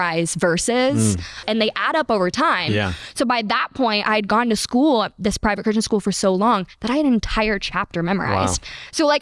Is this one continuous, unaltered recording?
no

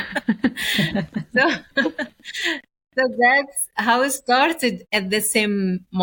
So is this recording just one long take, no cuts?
no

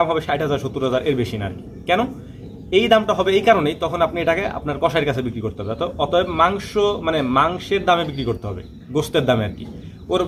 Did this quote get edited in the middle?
no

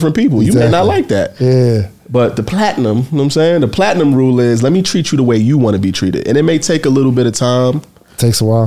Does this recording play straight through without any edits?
yes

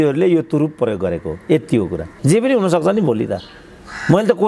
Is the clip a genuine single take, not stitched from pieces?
no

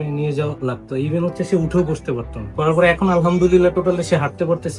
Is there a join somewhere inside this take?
yes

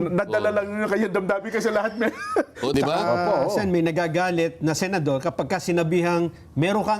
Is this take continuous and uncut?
no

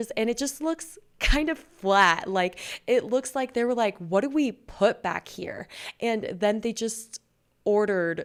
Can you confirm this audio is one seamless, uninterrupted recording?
yes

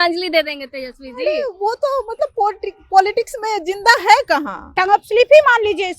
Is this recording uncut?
no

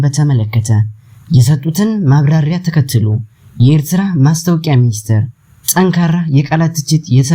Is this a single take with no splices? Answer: yes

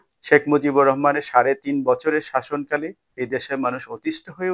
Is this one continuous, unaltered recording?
no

